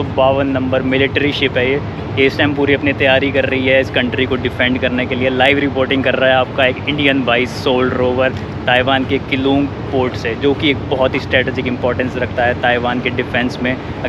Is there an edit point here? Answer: no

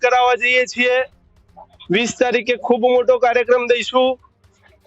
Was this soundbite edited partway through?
no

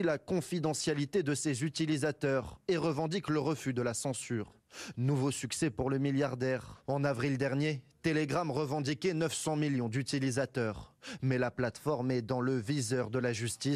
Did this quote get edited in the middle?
no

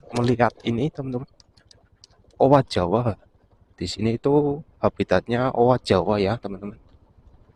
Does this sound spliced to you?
no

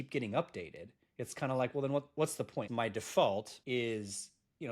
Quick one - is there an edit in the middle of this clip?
yes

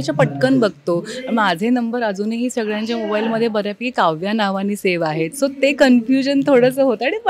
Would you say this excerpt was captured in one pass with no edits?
yes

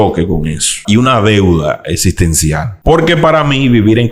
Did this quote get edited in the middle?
yes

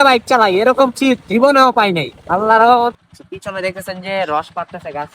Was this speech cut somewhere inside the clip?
yes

